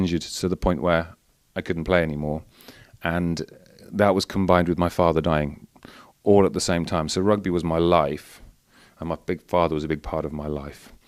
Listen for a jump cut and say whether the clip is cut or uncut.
uncut